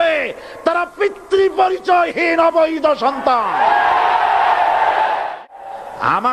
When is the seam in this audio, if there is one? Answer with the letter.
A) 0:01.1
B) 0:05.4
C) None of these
B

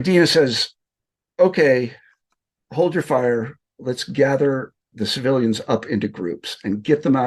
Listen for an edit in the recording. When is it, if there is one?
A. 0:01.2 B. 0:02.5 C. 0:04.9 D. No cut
C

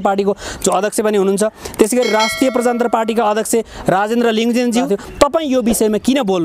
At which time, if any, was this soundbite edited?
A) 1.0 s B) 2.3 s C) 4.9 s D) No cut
C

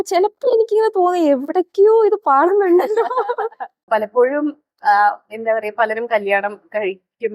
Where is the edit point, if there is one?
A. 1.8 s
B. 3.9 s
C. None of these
B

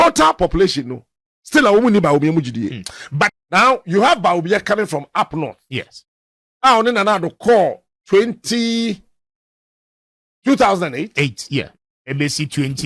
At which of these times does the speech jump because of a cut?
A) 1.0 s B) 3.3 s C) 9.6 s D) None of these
B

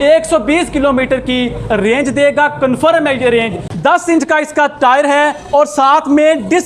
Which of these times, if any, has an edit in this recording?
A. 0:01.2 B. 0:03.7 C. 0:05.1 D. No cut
B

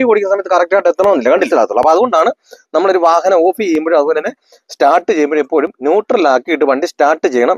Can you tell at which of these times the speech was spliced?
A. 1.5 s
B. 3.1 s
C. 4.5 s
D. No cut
A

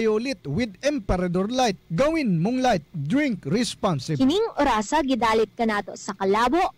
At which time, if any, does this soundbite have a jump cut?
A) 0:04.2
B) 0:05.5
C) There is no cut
A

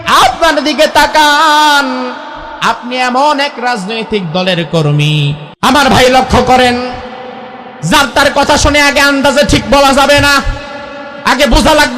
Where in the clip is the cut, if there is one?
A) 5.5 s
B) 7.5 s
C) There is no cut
A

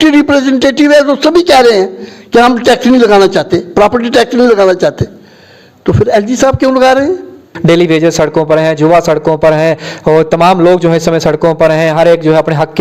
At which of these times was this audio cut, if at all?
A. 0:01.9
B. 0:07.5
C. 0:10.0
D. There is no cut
B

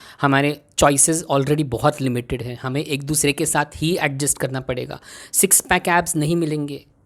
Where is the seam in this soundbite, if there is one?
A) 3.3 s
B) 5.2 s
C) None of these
C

